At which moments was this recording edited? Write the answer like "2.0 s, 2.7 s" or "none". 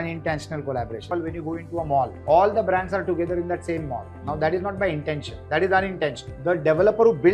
1.1 s, 2.2 s, 5.3 s, 6.3 s